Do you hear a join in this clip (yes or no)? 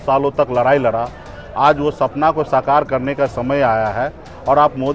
no